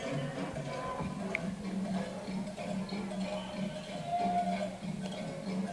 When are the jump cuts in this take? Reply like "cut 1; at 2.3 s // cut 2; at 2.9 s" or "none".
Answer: none